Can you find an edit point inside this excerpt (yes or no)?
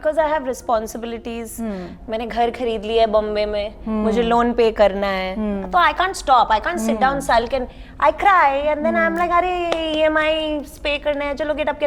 no